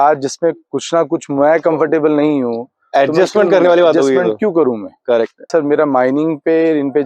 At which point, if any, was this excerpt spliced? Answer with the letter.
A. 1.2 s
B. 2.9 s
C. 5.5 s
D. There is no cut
C